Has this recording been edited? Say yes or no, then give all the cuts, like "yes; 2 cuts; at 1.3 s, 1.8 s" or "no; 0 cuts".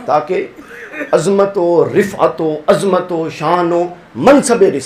no; 0 cuts